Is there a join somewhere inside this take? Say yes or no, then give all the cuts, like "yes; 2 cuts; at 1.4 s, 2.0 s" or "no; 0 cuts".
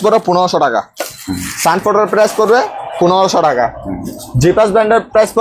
no; 0 cuts